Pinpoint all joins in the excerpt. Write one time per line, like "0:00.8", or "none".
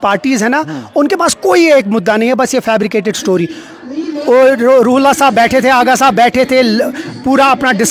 none